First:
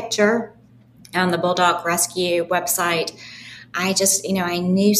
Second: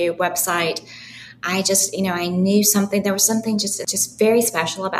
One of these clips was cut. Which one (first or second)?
second